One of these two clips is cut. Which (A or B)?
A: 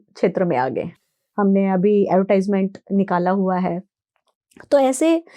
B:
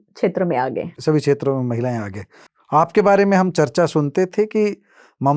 A